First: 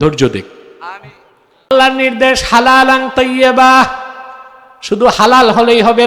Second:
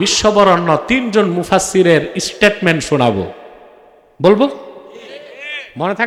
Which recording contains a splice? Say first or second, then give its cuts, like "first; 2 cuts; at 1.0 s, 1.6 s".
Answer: first; 1 cut; at 1.7 s